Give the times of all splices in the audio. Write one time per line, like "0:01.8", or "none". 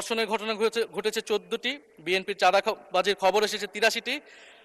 none